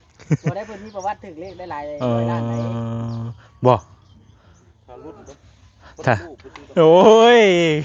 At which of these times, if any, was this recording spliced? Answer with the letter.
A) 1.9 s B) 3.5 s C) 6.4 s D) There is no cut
D